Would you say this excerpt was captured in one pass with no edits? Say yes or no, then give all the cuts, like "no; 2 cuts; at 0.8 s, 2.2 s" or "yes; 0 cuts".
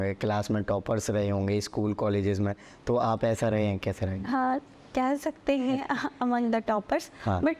yes; 0 cuts